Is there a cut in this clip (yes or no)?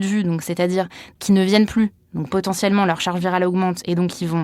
yes